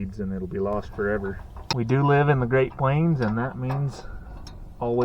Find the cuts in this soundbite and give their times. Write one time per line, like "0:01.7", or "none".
0:01.6